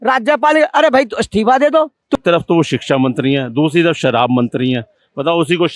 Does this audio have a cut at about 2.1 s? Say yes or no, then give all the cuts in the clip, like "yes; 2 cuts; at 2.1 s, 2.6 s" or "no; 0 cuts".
yes; 1 cut; at 2.1 s